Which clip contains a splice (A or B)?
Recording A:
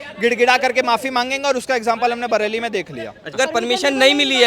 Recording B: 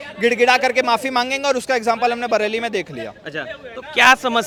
A